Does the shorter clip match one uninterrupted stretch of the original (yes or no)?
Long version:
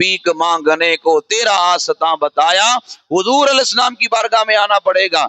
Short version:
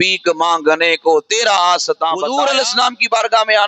no